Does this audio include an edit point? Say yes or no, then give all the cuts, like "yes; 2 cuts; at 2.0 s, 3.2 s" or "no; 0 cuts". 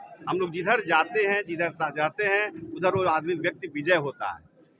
no; 0 cuts